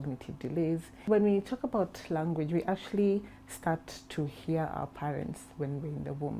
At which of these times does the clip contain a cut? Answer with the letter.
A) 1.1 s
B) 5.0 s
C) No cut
A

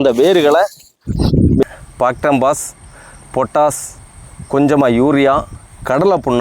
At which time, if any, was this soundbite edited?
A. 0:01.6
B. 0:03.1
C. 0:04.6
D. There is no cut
A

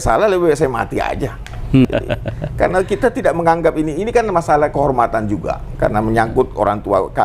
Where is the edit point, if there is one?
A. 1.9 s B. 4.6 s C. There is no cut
A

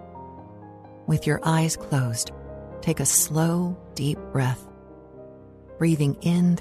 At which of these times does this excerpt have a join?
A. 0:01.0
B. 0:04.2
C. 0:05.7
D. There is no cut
A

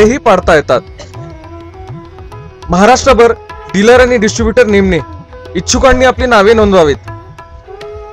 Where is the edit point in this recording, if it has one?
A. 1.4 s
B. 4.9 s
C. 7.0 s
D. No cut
C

